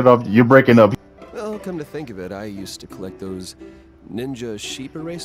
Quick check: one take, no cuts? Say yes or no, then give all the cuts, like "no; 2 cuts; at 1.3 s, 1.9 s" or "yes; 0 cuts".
no; 1 cut; at 0.9 s